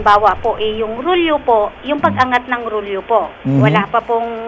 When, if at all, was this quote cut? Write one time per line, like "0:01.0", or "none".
none